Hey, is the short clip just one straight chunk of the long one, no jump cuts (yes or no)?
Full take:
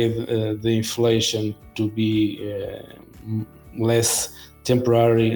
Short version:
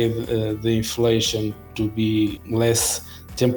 no